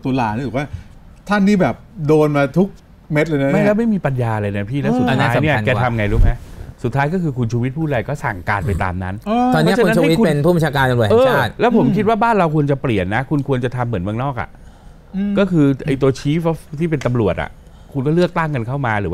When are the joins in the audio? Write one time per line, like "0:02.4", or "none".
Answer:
none